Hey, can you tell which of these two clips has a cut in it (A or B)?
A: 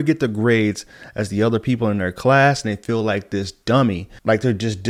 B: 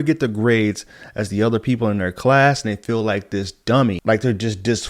B